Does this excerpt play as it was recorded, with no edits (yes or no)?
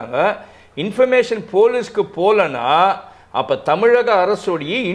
yes